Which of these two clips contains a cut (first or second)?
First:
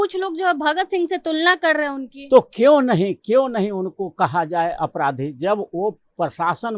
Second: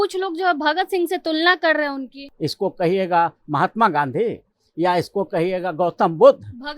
second